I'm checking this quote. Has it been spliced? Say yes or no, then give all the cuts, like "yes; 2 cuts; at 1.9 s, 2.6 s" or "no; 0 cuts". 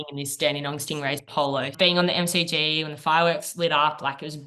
yes; 1 cut; at 1.7 s